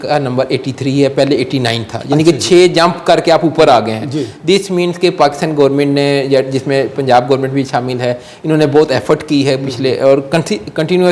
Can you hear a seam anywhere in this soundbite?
no; 0 cuts

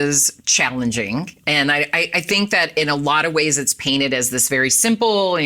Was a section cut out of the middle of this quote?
no; 0 cuts

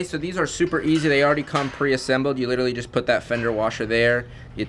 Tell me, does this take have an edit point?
no; 0 cuts

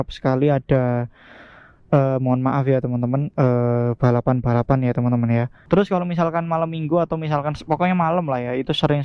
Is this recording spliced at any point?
yes; 1 cut; at 5.5 s

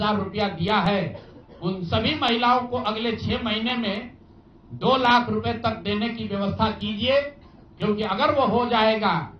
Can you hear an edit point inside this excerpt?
no; 0 cuts

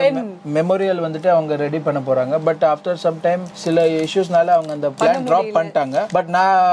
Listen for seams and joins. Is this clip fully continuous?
yes; 0 cuts

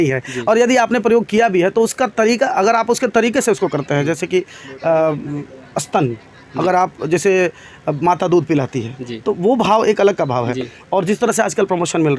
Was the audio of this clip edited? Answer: no; 0 cuts

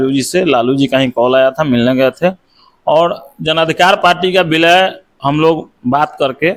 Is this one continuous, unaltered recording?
yes; 0 cuts

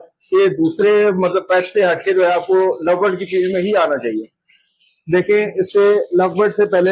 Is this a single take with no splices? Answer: yes; 0 cuts

